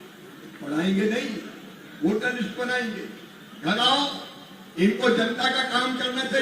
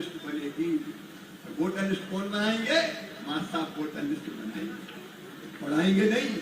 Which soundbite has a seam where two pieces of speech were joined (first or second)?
first